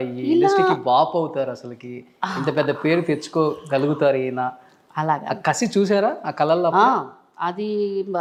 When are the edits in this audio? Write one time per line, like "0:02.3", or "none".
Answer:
none